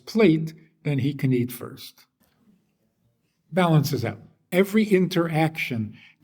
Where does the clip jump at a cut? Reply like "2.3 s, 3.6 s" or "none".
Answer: 2.2 s, 4.4 s